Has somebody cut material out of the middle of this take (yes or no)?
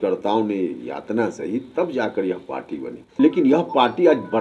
yes